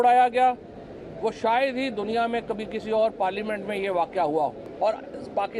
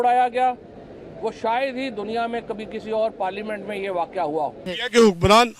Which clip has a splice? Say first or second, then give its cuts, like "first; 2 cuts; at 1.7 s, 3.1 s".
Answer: second; 1 cut; at 4.7 s